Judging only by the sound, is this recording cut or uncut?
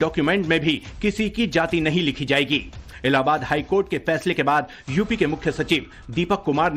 cut